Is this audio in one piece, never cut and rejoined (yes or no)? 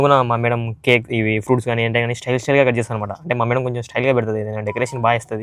yes